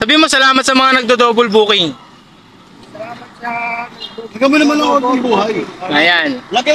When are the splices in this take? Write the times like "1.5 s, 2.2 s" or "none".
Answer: none